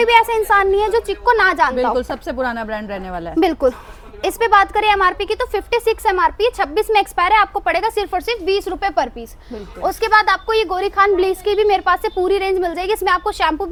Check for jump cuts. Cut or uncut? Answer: uncut